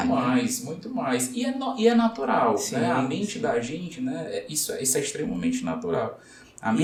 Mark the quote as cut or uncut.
uncut